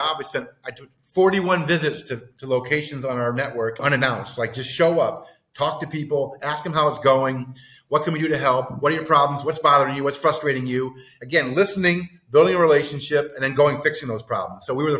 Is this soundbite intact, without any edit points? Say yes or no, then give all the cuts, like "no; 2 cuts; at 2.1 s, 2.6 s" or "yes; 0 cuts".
no; 1 cut; at 3.8 s